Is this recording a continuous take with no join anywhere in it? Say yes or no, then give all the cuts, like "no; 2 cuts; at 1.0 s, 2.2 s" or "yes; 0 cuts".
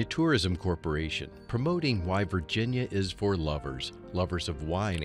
yes; 0 cuts